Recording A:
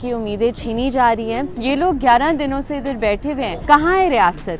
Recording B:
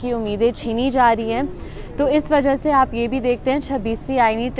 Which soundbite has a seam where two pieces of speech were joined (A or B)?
A